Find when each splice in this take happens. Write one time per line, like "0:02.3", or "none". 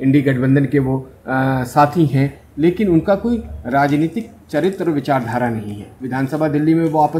0:05.9